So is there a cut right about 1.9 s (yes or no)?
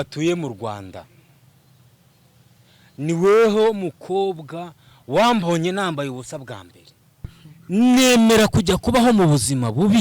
no